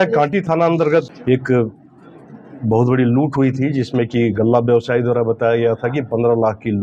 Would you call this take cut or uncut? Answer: cut